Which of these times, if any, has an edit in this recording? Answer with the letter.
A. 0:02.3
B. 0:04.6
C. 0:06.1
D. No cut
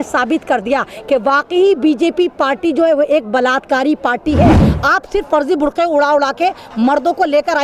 B